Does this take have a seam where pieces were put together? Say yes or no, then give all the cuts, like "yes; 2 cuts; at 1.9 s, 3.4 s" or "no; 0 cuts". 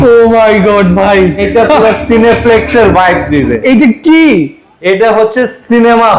yes; 2 cuts; at 1.4 s, 3.6 s